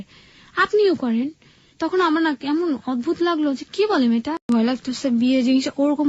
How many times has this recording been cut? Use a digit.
1